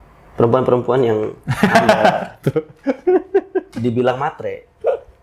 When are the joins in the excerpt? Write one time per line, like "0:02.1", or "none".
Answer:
none

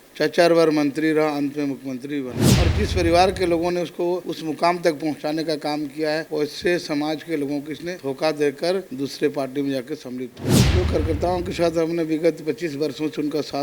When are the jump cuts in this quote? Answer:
0:04.3
0:06.3
0:07.9
0:08.9
0:10.6

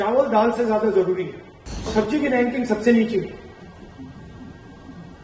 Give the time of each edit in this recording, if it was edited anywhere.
0:01.9

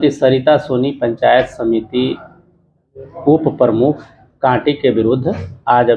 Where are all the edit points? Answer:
none

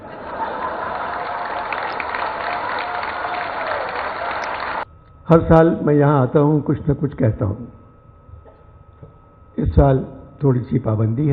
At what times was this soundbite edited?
0:04.8

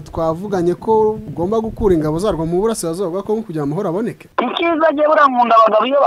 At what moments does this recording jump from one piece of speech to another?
0:01.3
0:04.2

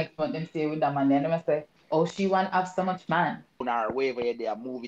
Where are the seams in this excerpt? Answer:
0:03.6

